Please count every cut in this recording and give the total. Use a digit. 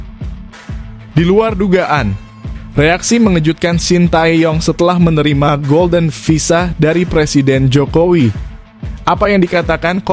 1